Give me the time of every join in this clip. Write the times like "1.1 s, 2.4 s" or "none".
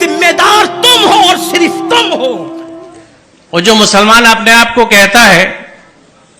2.7 s